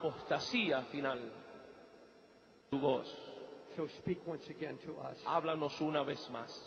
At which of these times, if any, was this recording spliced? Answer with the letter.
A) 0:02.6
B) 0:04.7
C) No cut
C